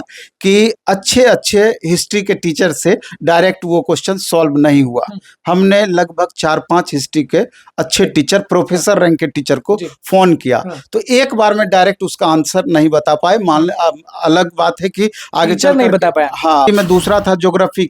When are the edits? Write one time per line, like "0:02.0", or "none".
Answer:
0:16.7